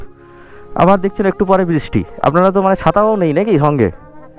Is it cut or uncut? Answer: uncut